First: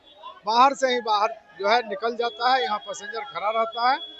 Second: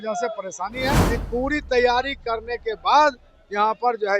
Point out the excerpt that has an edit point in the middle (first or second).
second